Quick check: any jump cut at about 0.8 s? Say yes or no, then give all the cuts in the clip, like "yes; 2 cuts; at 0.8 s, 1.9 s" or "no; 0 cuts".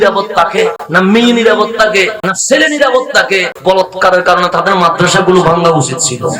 yes; 3 cuts; at 0.8 s, 2.2 s, 3.5 s